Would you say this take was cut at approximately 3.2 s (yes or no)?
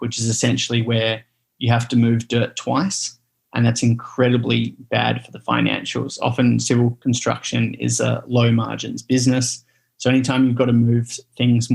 no